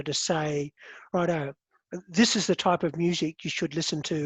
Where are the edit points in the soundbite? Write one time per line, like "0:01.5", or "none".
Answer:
none